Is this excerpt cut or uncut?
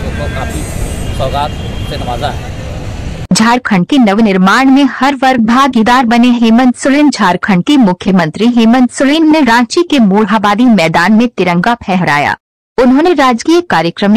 cut